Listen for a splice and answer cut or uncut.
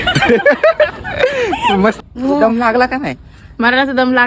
cut